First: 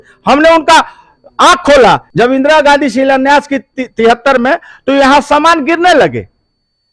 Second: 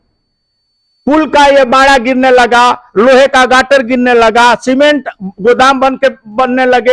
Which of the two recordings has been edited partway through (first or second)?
first